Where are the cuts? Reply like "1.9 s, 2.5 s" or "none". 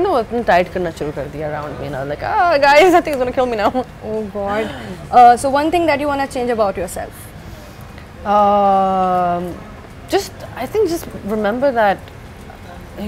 none